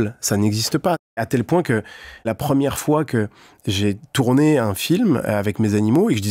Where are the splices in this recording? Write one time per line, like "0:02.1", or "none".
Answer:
0:01.2
0:02.3